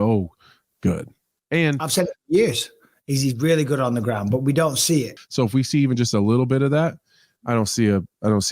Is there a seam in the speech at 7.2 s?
no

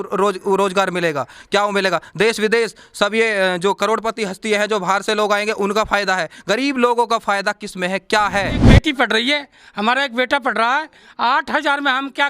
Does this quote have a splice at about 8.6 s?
yes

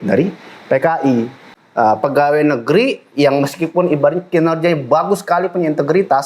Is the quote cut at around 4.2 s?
no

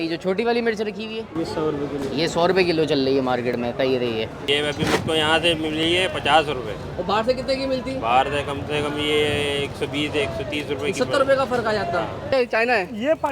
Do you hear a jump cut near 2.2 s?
no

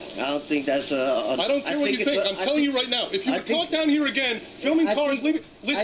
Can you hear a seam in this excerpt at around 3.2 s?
yes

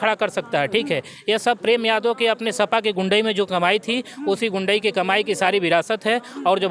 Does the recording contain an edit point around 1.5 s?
no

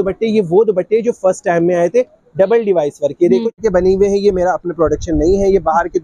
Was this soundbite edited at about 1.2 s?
no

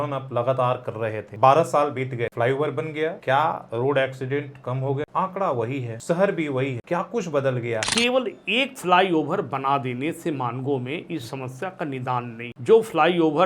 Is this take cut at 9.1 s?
no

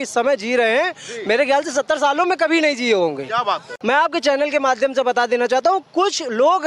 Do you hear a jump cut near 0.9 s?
no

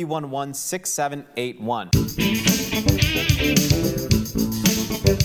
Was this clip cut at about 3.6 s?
no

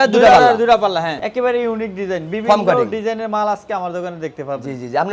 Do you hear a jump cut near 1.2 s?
yes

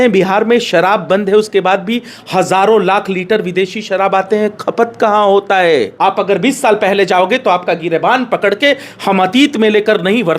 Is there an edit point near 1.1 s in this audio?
no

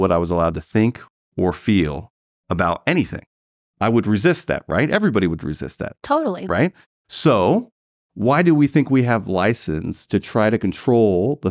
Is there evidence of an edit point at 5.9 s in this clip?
no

